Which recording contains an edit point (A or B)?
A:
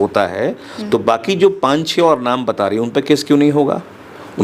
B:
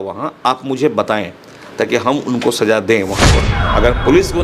B